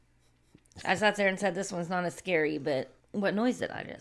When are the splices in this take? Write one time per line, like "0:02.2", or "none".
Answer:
0:03.0

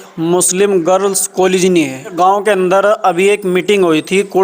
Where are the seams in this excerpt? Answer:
0:02.1

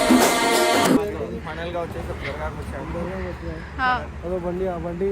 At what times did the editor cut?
none

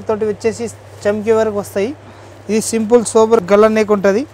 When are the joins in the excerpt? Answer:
0:03.4

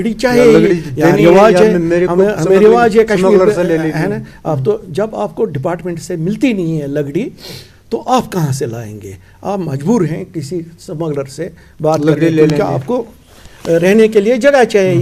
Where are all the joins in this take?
none

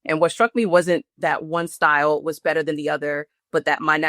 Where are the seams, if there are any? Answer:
0:01.0

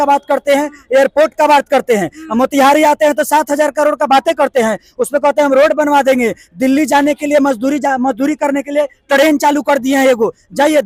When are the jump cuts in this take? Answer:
none

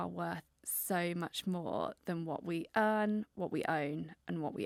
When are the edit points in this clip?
none

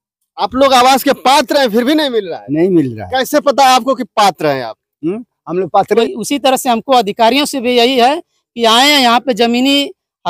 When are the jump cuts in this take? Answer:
0:06.0

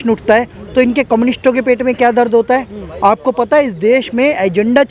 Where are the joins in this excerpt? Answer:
none

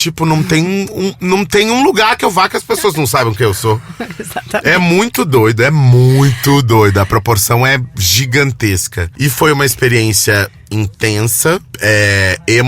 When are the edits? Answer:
0:09.0
0:11.7

